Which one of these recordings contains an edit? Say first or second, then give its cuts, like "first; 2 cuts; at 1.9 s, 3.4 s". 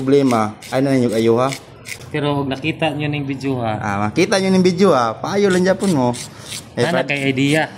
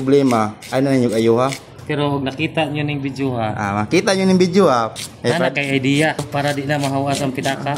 second; 3 cuts; at 1.7 s, 4.9 s, 6.2 s